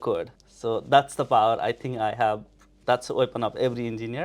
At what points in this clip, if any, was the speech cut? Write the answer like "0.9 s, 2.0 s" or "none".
2.8 s